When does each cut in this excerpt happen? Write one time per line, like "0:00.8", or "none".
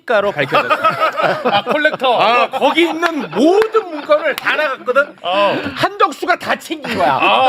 none